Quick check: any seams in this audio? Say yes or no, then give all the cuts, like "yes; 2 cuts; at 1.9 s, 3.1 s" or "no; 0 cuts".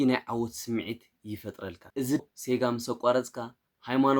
yes; 1 cut; at 2.2 s